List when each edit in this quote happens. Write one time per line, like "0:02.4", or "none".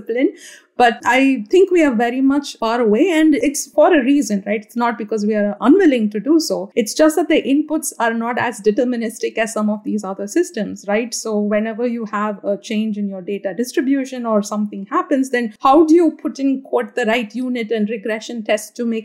0:01.0
0:02.6
0:03.4
0:06.6
0:15.5